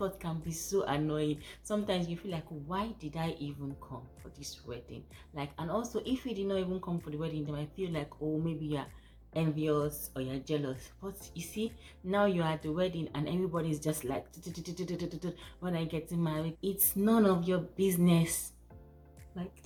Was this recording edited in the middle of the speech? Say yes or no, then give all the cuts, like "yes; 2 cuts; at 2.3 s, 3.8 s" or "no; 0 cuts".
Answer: no; 0 cuts